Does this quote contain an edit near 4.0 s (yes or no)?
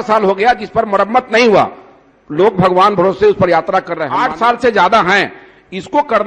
yes